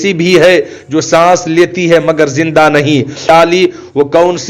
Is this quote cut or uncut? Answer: cut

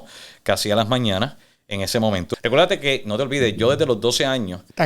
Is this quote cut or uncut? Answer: cut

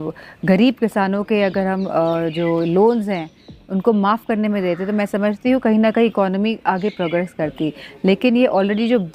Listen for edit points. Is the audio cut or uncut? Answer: uncut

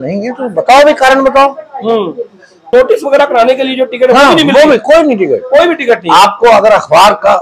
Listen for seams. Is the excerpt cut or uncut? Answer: cut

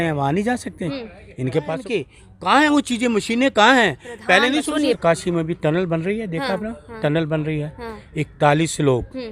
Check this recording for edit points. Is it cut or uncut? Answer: cut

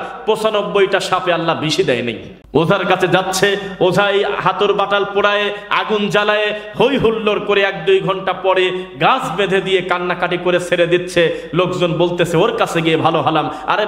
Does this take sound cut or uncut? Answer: cut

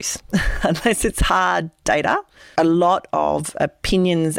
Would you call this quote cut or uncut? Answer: cut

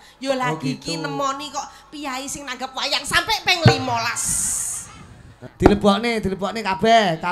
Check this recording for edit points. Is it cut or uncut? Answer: cut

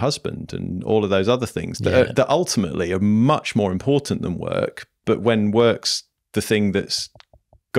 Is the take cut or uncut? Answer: uncut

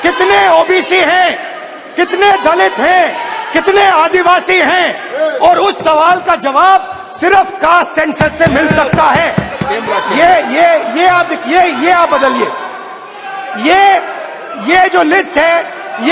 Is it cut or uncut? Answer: cut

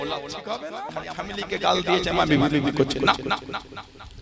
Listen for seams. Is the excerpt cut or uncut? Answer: cut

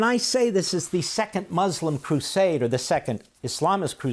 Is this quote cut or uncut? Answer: uncut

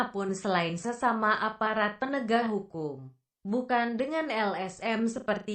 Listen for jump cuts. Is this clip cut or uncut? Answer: cut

